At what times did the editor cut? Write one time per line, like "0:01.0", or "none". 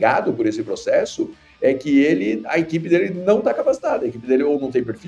none